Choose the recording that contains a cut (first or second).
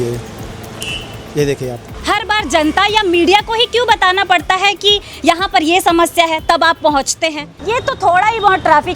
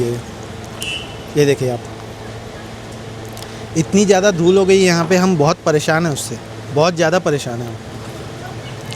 first